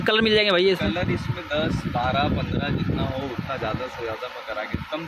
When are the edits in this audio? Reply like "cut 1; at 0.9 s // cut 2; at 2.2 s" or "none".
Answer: none